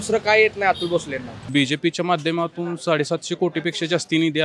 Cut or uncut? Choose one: cut